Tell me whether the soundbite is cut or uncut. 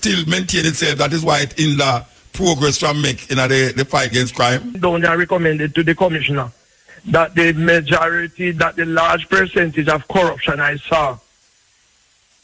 cut